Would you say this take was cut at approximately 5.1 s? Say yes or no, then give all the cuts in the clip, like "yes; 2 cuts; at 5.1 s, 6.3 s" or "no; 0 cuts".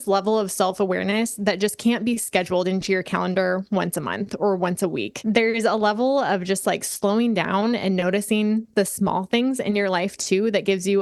yes; 1 cut; at 5.1 s